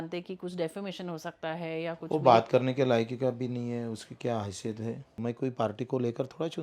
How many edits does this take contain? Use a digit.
1